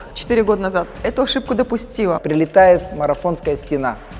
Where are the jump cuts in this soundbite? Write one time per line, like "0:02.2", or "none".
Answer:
0:02.2